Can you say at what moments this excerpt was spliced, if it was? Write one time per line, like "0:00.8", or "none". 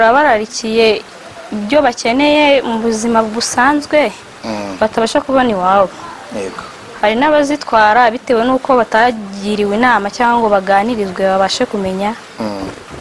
none